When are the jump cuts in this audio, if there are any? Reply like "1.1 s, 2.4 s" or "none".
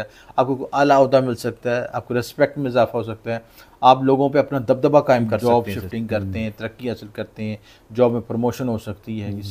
5.4 s